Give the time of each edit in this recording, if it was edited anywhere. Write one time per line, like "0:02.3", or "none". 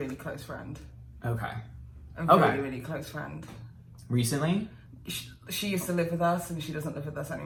none